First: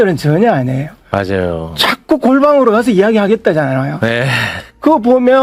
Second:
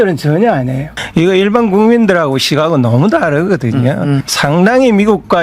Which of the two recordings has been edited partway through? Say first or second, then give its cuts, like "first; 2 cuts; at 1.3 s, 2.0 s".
second; 2 cuts; at 1.0 s, 4.3 s